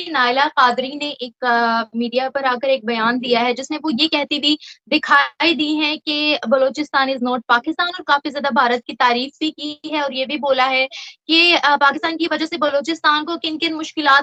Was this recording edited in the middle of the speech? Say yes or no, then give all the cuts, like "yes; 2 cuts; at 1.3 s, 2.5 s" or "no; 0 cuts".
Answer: no; 0 cuts